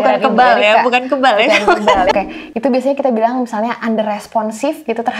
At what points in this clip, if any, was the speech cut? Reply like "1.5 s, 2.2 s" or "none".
2.1 s